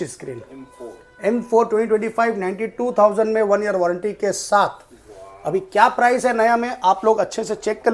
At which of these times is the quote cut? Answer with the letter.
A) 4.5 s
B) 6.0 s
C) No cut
C